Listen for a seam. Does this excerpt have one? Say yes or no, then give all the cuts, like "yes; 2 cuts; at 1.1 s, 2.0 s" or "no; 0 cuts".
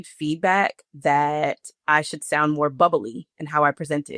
no; 0 cuts